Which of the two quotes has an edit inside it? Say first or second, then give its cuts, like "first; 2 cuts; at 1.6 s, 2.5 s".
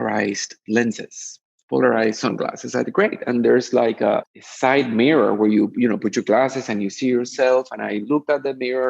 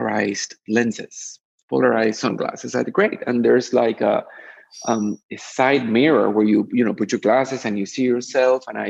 first; 1 cut; at 4.4 s